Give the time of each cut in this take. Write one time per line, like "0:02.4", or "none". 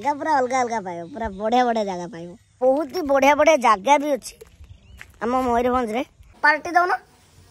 0:02.5
0:06.2